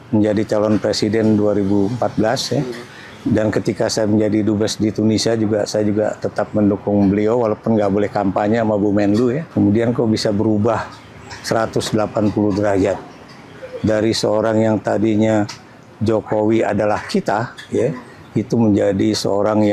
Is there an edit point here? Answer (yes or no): yes